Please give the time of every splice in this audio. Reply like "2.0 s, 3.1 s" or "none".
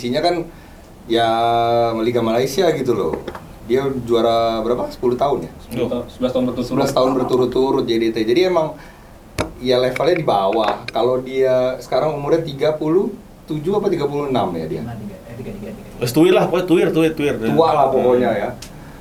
none